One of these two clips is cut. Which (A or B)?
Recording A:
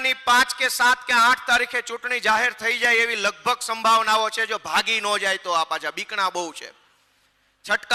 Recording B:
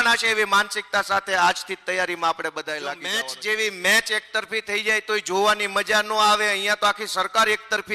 B